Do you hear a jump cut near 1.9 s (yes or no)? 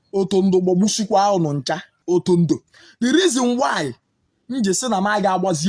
yes